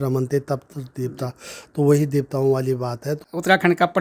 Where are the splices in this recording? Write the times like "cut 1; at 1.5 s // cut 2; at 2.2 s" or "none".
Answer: cut 1; at 3.1 s